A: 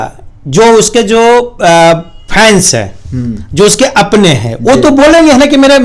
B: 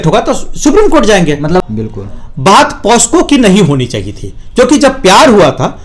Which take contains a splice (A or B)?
B